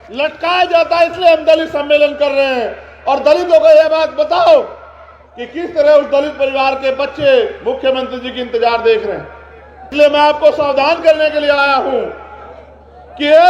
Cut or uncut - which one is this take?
cut